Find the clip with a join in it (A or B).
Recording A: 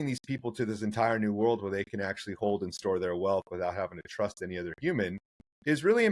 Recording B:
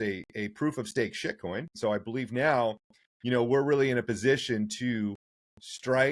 B